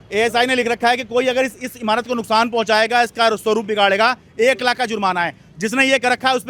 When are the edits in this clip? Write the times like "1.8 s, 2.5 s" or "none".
none